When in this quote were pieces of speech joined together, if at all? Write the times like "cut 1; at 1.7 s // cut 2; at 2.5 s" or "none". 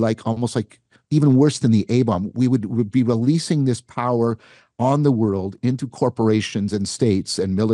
cut 1; at 5.6 s